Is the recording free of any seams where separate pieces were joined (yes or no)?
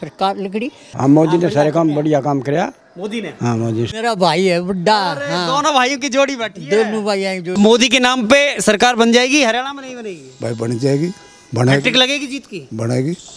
no